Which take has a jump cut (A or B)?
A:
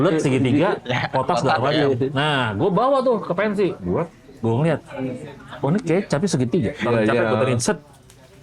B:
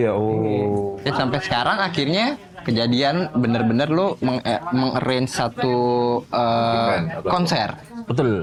A